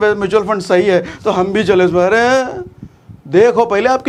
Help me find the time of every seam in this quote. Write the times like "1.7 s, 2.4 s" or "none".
none